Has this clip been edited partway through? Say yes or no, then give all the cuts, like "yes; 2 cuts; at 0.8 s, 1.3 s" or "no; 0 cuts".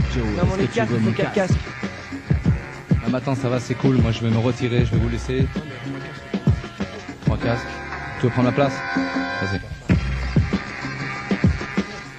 yes; 1 cut; at 2.9 s